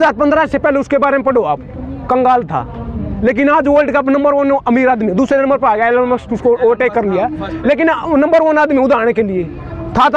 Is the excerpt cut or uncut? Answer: uncut